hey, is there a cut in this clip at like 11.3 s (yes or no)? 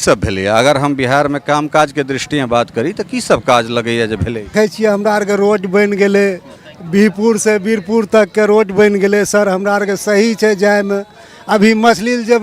no